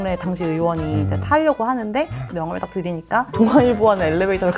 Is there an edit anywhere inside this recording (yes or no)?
yes